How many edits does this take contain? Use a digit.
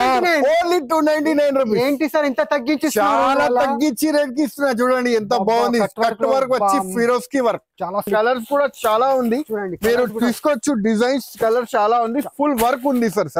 1